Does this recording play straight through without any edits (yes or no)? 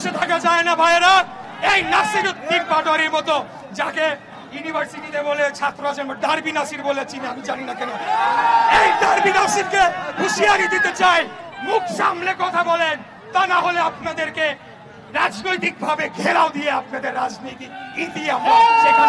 yes